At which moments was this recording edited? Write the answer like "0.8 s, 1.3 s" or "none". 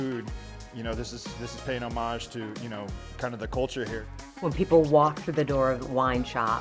4.0 s